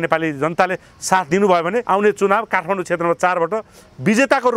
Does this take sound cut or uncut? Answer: cut